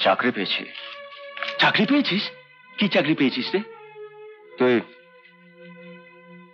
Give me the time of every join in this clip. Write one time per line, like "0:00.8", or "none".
none